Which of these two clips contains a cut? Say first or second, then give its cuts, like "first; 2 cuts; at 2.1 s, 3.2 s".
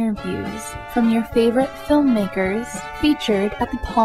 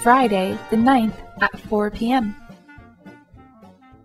second; 1 cut; at 2.4 s